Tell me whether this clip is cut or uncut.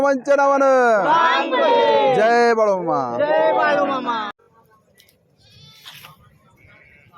cut